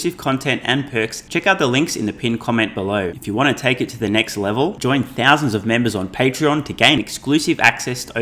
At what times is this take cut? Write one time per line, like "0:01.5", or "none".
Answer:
0:01.2
0:03.2